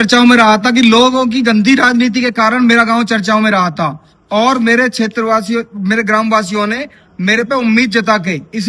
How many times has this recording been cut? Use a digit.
0